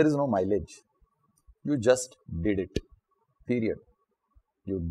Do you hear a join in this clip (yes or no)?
no